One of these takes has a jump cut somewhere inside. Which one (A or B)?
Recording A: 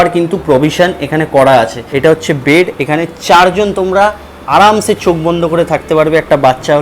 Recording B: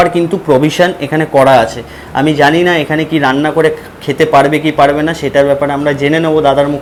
A